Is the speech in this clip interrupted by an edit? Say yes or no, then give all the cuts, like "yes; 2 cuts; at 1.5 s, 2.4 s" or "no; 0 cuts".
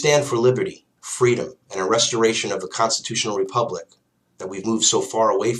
yes; 1 cut; at 3.1 s